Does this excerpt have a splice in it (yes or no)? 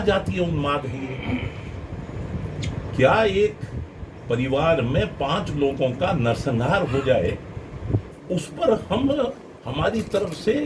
no